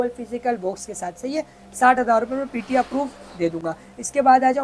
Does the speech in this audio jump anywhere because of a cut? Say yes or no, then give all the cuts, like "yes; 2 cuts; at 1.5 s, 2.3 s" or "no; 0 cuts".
no; 0 cuts